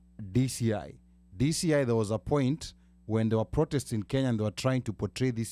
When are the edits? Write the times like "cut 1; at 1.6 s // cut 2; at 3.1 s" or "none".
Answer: none